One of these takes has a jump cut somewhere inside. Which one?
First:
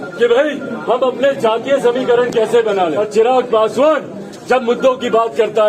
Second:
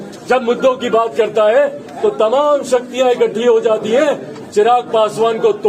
first; 1 cut; at 3.0 s

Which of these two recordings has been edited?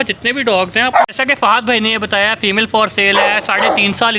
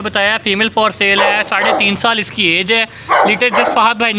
first; 1 cut; at 1.0 s

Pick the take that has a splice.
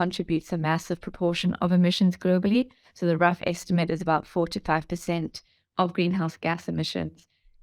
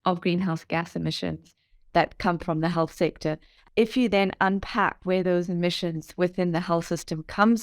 second; 1 cut; at 3.5 s

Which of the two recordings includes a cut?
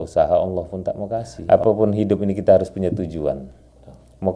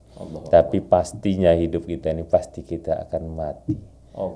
first; 1 cut; at 1.3 s

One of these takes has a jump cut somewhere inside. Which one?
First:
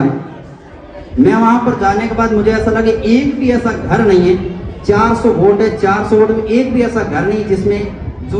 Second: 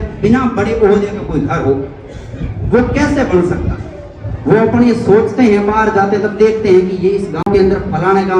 second; 1 cut; at 7.4 s

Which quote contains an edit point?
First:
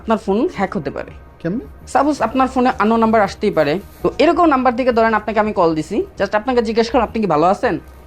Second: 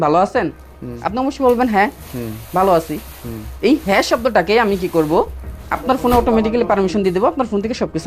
first; 2 cuts; at 1.8 s, 3.9 s

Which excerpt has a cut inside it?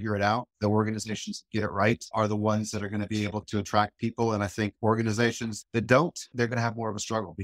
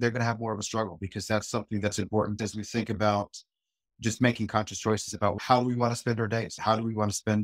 second; 3 cuts; at 2.4 s, 5.4 s, 6.5 s

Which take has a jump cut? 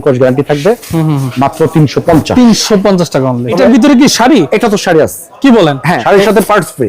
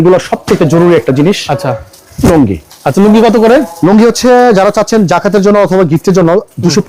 first; 2 cuts; at 3.5 s, 5.9 s

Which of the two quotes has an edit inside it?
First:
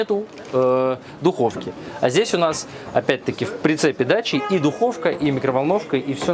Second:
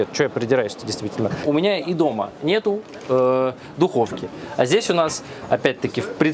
second; 1 cut; at 1.4 s

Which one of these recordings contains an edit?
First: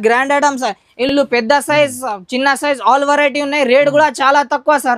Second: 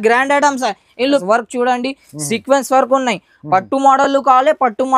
second; 1 cut; at 1.1 s

